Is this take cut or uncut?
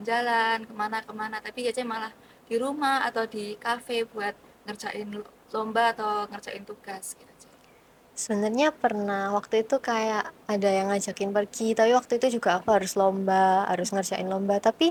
uncut